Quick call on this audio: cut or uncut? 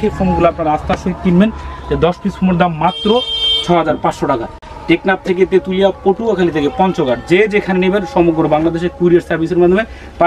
uncut